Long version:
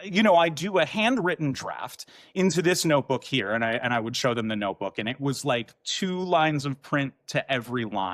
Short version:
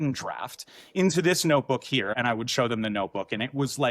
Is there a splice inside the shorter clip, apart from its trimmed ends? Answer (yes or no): yes